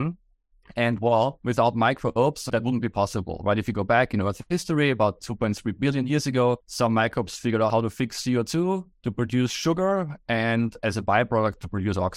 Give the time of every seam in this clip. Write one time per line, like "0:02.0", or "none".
0:01.4
0:02.4
0:06.7
0:07.7
0:09.0